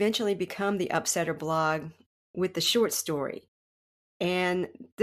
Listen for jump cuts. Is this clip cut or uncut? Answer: uncut